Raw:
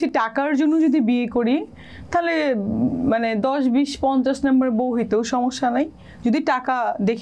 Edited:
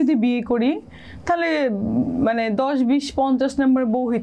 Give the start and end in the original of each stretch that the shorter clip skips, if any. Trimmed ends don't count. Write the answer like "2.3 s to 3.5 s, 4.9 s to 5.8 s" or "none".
none